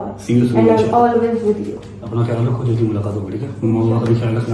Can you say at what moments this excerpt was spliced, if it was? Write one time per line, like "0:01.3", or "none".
none